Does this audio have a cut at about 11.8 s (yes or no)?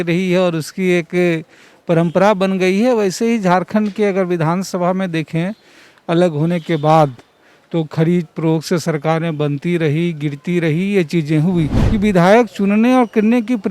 yes